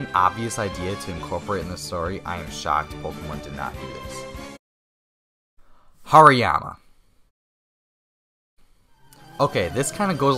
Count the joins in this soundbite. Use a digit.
1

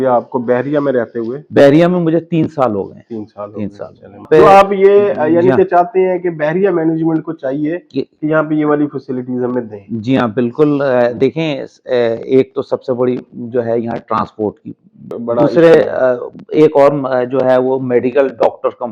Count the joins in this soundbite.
2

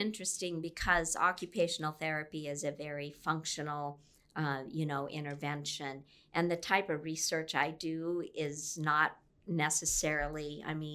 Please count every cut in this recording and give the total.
0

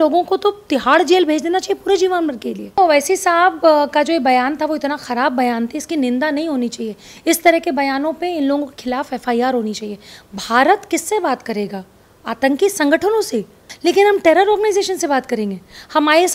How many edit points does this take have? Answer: 2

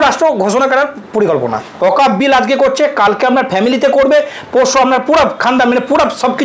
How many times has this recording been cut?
1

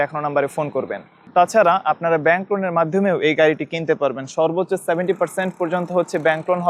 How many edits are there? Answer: 0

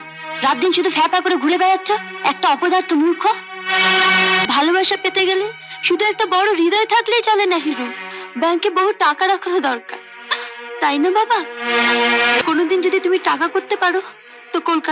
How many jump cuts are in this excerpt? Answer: 2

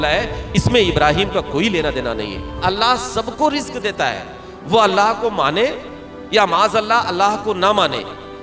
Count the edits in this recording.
1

